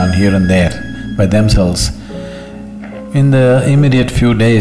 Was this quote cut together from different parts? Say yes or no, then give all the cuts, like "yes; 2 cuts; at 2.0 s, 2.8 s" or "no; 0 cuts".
no; 0 cuts